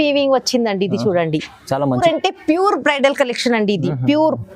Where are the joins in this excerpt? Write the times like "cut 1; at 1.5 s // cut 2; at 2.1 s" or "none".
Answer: cut 1; at 2.0 s